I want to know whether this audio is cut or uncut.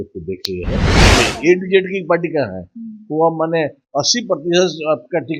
cut